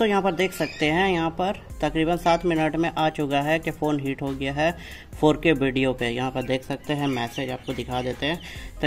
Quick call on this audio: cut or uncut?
uncut